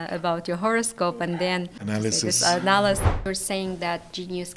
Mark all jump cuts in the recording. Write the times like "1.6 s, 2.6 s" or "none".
1.8 s, 3.2 s